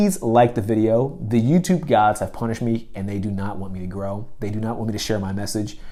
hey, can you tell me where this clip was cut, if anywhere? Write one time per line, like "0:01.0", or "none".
none